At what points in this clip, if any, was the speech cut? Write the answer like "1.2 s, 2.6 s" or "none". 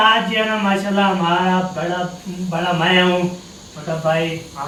none